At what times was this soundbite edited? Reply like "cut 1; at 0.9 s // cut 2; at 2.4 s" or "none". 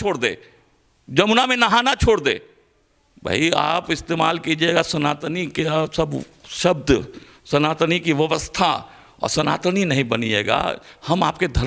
none

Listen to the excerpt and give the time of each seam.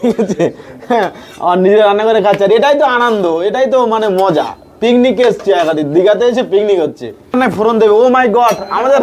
cut 1; at 7.3 s

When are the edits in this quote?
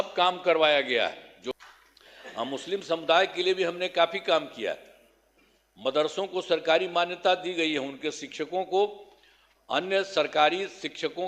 cut 1; at 1.5 s

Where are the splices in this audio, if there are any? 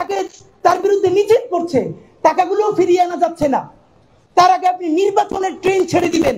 cut 1; at 4.2 s

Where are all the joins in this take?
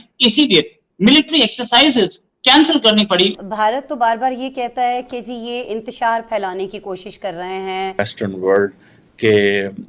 cut 1; at 3.4 s // cut 2; at 8.0 s

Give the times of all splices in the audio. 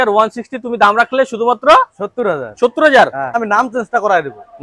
cut 1; at 3.4 s

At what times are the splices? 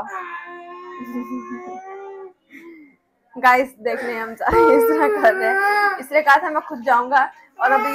none

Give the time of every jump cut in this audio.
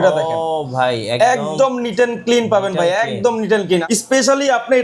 cut 1; at 3.8 s

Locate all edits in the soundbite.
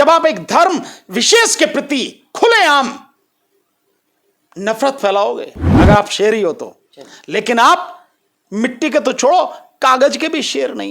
cut 1; at 5.7 s

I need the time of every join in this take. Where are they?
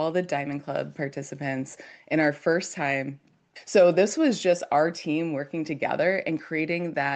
cut 1; at 3.5 s

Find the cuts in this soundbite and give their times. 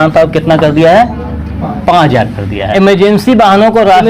cut 1; at 2.7 s

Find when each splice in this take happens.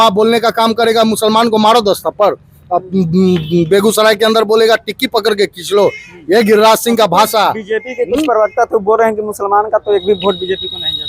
none

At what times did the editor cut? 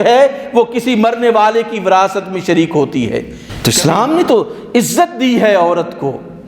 cut 1; at 3.4 s

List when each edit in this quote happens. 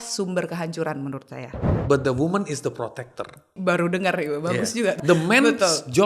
cut 1; at 1.7 s // cut 2; at 3.5 s // cut 3; at 5.0 s

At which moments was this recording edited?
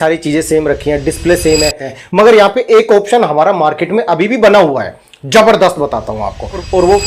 cut 1; at 1.9 s

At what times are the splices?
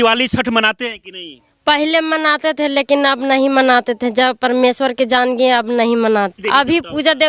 cut 1; at 6.3 s

